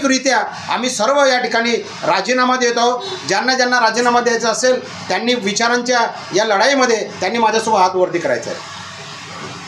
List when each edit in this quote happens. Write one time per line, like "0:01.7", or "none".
none